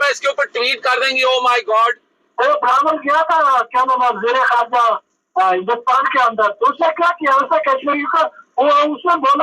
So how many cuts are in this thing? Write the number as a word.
one